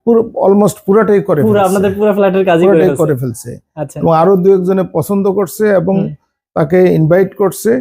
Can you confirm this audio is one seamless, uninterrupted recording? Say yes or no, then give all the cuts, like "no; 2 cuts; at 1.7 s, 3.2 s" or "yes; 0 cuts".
yes; 0 cuts